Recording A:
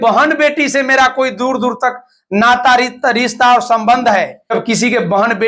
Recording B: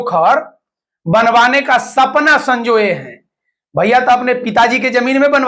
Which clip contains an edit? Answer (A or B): A